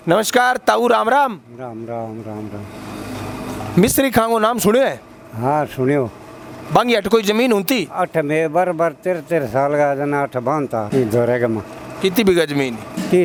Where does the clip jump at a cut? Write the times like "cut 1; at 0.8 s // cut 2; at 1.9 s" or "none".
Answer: none